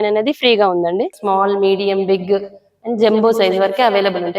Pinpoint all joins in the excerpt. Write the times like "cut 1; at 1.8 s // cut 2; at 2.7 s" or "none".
cut 1; at 1.1 s